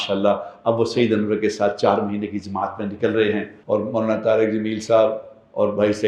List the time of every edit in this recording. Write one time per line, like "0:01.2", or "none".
0:03.5